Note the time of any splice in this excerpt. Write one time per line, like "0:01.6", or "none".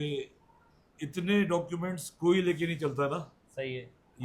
none